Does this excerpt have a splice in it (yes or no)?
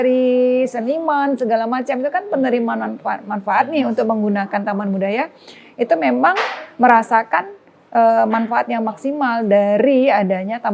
no